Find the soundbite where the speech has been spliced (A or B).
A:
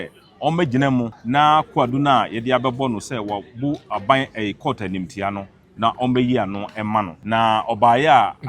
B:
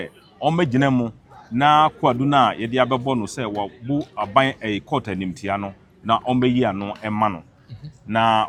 A